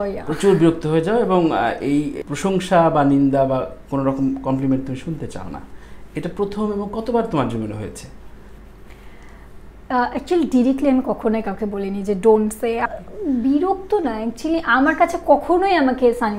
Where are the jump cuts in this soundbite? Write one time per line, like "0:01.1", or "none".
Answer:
0:02.2
0:12.8